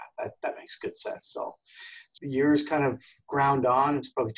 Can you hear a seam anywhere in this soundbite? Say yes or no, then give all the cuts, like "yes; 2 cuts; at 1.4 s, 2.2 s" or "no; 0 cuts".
yes; 1 cut; at 2.1 s